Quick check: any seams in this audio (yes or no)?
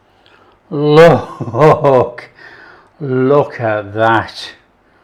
no